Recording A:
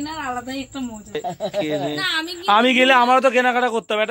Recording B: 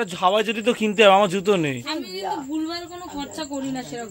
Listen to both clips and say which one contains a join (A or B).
A